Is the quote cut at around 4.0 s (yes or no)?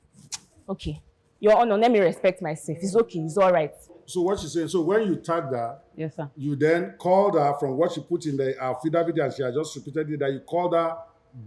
yes